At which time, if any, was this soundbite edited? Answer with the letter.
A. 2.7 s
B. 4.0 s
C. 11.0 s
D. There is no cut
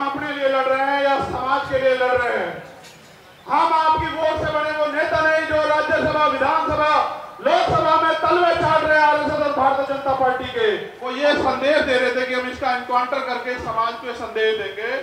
C